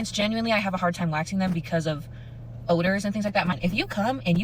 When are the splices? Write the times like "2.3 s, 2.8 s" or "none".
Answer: 3.5 s

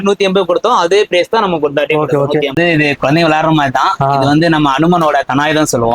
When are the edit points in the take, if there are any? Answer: 2.6 s

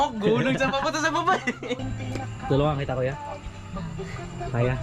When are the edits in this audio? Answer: 1.8 s

